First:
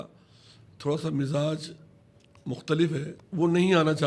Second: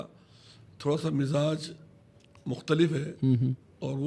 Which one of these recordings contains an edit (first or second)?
first